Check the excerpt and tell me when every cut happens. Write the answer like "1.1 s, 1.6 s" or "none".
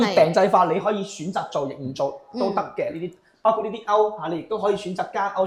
none

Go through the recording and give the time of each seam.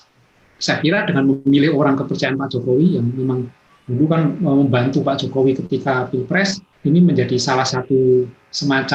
6.7 s

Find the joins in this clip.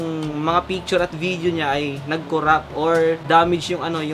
3.2 s

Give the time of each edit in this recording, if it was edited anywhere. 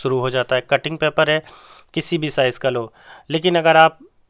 none

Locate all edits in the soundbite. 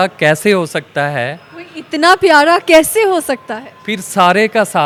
none

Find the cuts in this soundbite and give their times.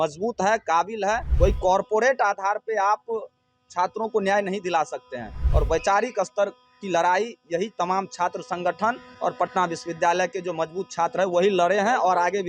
1.3 s, 5.4 s

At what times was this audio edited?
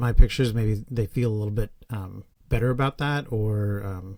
none

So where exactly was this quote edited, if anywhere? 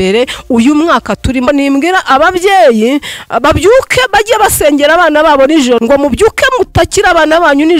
1.5 s, 5.8 s

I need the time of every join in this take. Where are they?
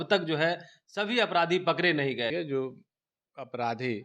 2.3 s

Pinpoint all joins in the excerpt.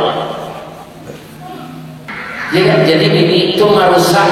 2.1 s

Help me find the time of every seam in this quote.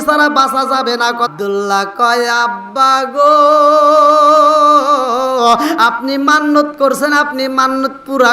1.3 s

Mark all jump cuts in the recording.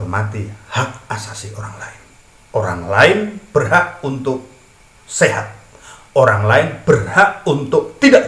none

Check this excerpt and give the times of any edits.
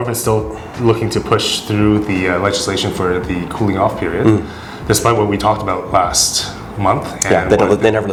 none

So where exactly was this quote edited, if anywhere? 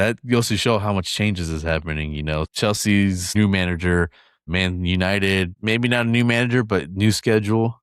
2.5 s, 3.3 s, 4.5 s, 5.5 s

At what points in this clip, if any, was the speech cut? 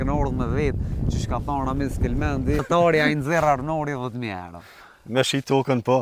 2.6 s

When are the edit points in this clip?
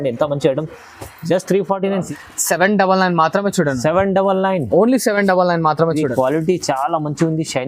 2.1 s

